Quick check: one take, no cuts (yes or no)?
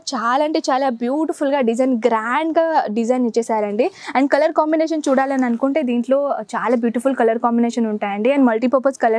no